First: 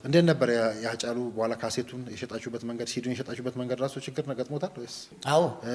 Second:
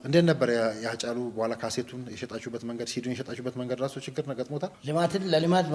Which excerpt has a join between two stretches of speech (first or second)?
second